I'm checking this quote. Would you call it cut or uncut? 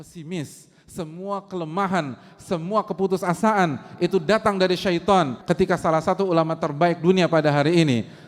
cut